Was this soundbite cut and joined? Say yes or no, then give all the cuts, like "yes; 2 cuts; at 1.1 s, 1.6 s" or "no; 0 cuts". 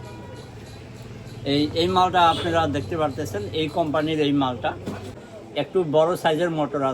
yes; 1 cut; at 5.2 s